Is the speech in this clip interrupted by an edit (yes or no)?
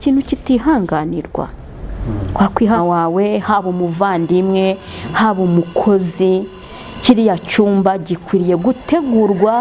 yes